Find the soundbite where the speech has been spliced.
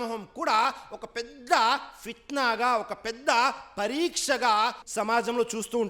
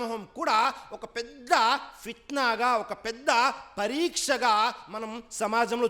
first; 1 cut; at 4.8 s

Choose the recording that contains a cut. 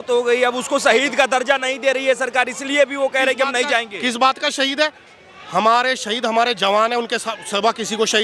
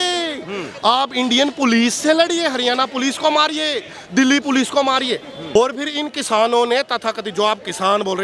second; 1 cut; at 5.6 s

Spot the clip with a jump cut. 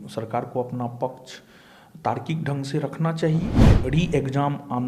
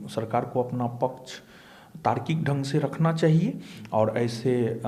first; 1 cut; at 3.6 s

